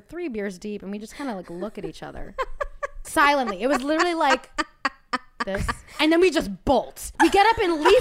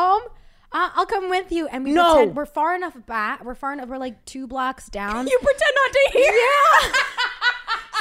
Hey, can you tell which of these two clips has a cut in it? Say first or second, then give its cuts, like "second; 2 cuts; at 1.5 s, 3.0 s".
first; 3 cuts; at 3.1 s, 6.0 s, 7.0 s